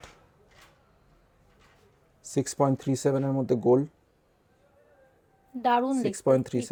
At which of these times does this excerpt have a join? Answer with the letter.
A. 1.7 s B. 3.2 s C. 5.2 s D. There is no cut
D